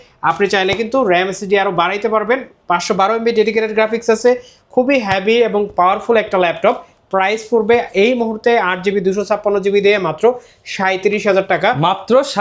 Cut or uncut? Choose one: uncut